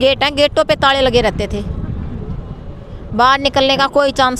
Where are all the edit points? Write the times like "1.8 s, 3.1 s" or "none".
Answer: none

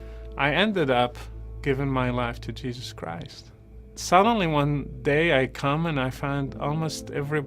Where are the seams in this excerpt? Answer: 3.8 s

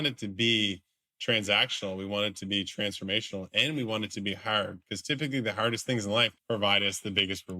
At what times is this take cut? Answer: 6.4 s

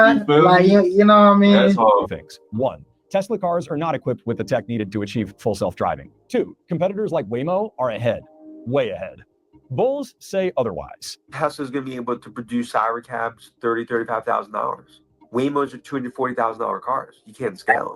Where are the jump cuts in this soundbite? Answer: 2.2 s

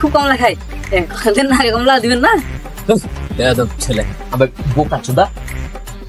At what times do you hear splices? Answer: none

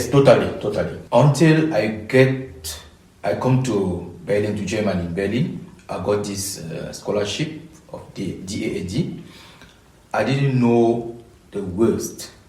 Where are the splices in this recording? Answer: 0.9 s

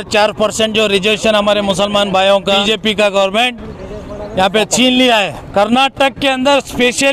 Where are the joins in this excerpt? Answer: 2.6 s, 5.4 s

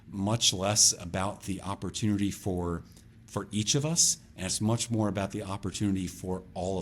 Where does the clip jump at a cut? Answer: none

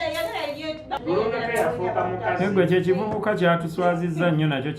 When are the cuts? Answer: 1.0 s

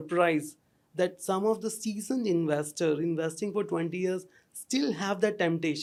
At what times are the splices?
none

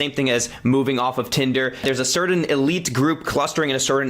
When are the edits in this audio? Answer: 1.8 s

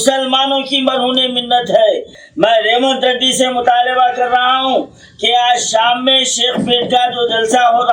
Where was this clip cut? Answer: 2.2 s

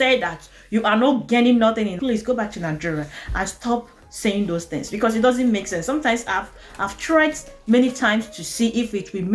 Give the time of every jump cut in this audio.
2.0 s

